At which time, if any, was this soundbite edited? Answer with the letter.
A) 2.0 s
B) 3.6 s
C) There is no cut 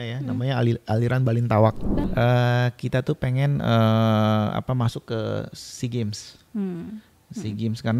A